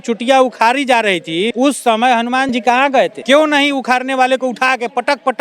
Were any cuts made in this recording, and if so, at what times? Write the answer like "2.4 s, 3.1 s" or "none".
1.5 s, 3.2 s